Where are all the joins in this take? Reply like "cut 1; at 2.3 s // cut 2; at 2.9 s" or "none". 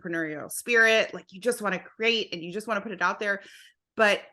none